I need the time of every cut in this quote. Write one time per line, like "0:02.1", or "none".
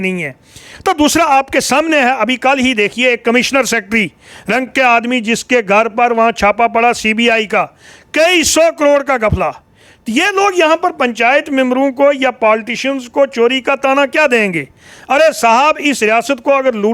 none

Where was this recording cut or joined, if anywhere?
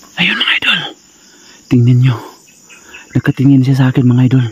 none

